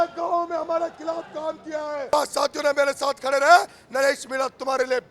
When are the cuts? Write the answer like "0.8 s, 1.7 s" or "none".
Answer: 2.1 s